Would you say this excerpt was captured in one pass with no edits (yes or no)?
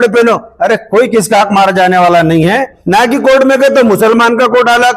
no